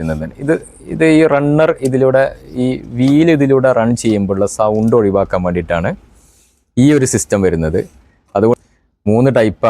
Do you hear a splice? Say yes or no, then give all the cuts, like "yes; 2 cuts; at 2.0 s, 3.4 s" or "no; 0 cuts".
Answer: yes; 1 cut; at 8.5 s